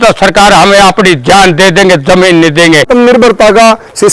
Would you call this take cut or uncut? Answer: cut